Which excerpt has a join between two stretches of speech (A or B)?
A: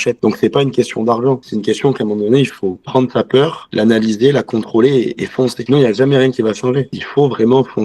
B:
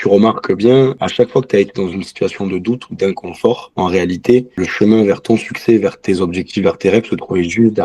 B